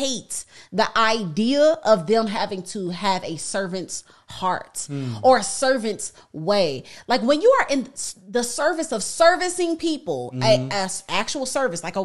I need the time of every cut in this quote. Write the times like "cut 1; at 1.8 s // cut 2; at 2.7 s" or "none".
none

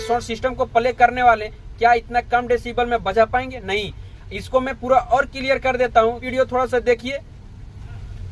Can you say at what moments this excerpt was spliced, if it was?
cut 1; at 6.3 s

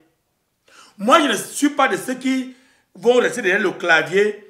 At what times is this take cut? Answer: none

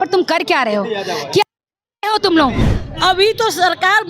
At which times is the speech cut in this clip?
cut 1; at 2.7 s

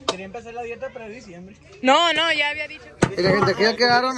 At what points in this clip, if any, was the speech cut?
cut 1; at 2.7 s

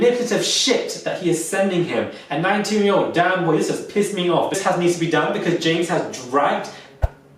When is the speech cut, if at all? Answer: cut 1; at 4.6 s

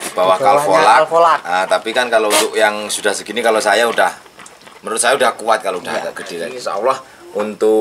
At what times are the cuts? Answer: cut 1; at 6.6 s

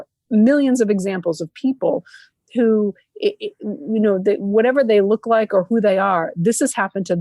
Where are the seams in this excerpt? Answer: none

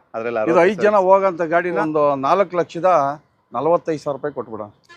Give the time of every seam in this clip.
cut 1; at 1.8 s

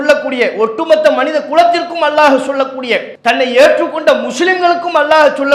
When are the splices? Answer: cut 1; at 3.1 s

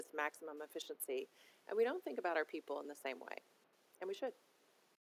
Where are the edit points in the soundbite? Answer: none

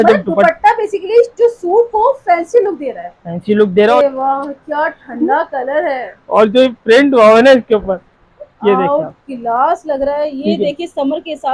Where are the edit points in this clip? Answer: cut 1; at 3.9 s

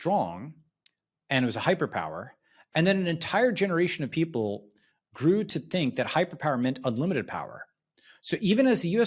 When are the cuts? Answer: none

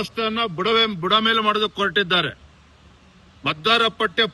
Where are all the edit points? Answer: none

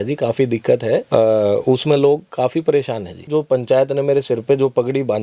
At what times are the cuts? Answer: cut 1; at 3.2 s

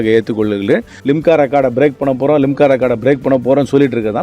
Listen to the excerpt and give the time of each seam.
cut 1; at 0.9 s

